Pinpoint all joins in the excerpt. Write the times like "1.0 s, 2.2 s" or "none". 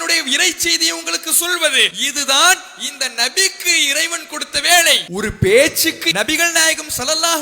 2.0 s, 5.0 s, 6.0 s